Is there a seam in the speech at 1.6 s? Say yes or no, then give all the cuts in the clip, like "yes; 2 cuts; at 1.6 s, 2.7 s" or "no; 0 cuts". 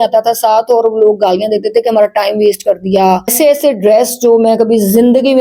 no; 1 cut; at 3.3 s